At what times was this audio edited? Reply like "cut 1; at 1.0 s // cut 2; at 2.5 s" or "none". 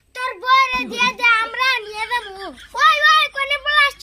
cut 1; at 2.6 s